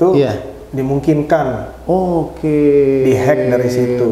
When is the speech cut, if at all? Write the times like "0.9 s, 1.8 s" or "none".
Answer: none